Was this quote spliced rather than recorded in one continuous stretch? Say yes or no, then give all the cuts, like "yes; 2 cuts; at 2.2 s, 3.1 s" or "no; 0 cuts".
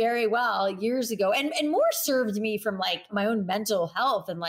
yes; 1 cut; at 3.1 s